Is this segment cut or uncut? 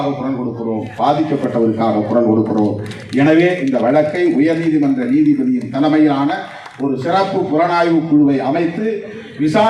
uncut